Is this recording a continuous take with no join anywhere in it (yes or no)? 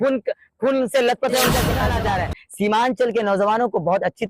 no